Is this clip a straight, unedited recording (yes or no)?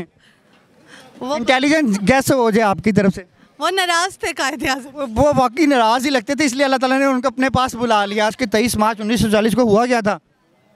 no